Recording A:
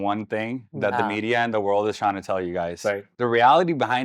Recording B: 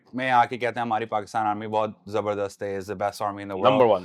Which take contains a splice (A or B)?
A